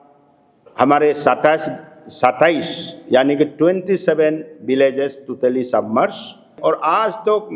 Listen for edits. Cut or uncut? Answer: cut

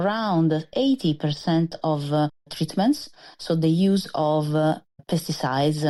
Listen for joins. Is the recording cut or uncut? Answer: uncut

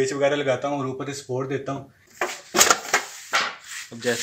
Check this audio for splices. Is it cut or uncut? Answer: cut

